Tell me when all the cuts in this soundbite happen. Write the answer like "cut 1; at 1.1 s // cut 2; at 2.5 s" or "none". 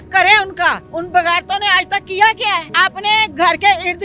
cut 1; at 0.9 s // cut 2; at 2.7 s